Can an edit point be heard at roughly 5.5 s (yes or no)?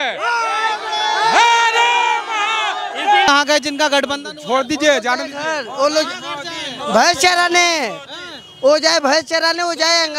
no